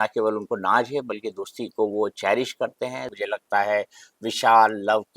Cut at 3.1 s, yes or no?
yes